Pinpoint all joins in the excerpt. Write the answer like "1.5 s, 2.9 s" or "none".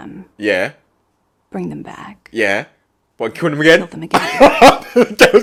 none